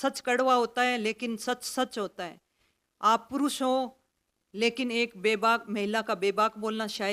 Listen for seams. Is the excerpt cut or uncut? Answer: uncut